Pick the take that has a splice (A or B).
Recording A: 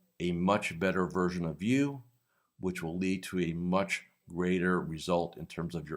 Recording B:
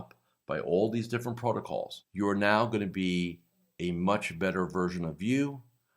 B